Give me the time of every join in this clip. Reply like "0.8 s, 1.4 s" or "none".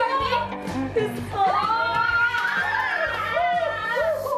2.5 s